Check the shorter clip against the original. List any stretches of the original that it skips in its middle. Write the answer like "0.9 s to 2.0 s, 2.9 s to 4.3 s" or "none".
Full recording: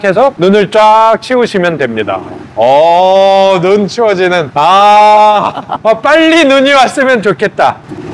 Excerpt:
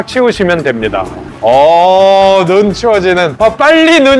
4.4 s to 5.7 s

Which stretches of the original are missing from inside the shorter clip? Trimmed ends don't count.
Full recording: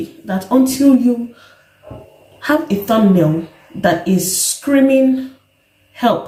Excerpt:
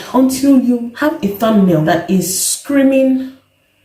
1.3 s to 2.4 s, 3.3 s to 3.8 s

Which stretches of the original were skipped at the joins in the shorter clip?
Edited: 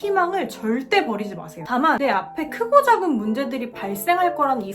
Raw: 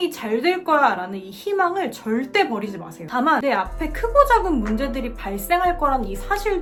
none

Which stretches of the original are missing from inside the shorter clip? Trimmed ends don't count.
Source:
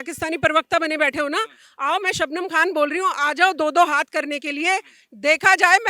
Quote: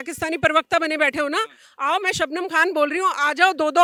none

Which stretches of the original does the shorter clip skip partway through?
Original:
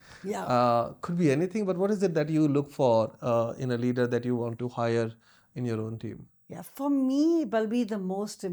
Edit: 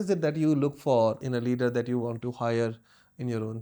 3.2 s to 3.6 s

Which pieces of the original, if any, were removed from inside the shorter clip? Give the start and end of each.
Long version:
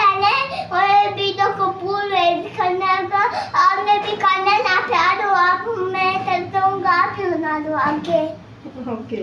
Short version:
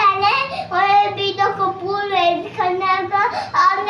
none

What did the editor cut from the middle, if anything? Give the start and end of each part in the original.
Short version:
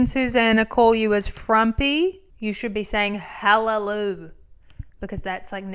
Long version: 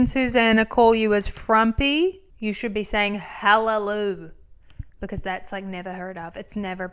none

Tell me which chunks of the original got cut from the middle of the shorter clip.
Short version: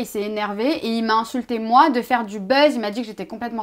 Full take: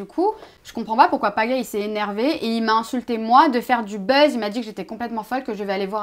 none

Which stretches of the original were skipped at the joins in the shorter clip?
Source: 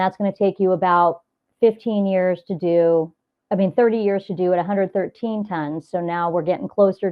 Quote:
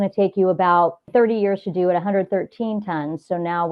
1.3 s to 3.7 s

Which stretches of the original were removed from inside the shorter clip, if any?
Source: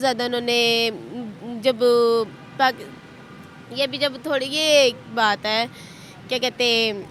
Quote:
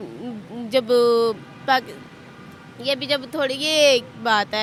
none

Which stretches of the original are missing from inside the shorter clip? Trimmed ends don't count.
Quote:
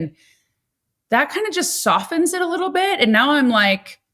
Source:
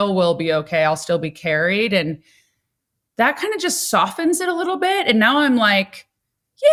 none

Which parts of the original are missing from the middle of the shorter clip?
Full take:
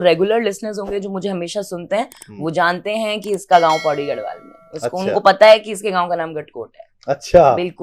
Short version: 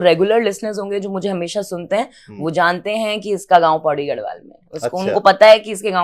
none

